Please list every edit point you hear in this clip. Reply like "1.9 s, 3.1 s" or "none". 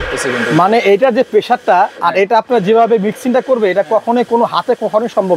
none